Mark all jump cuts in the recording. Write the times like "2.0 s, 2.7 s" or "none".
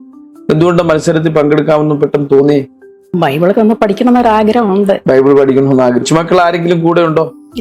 6.0 s